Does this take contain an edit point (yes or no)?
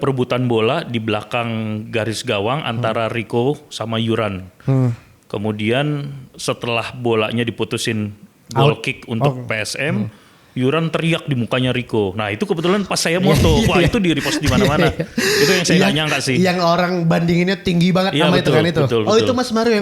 no